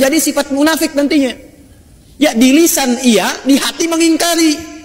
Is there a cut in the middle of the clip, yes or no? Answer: no